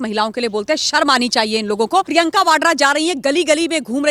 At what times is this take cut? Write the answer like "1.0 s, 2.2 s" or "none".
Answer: 2.1 s